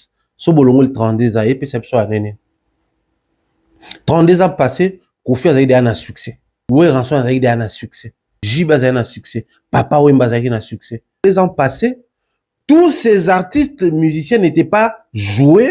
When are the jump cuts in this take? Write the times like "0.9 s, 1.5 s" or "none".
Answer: 6.5 s, 8.4 s, 11.2 s

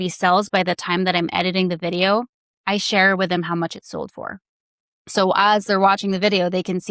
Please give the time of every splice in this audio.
none

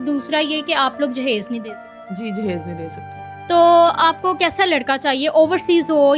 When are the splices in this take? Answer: 3.3 s

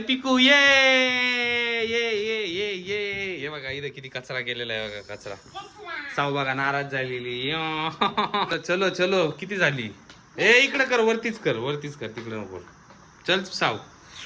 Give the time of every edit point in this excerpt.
8.5 s

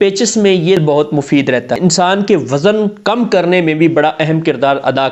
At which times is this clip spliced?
0.8 s, 1.7 s

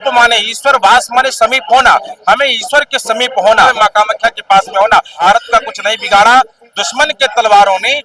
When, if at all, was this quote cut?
3.7 s, 5.2 s

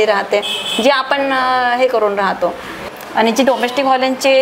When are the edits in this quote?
2.8 s

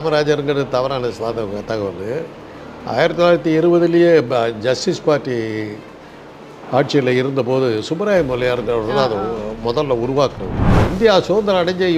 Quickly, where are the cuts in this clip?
10.8 s

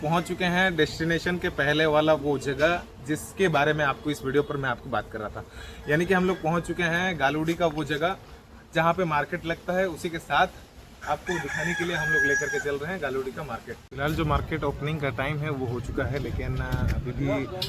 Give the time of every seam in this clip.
13.9 s

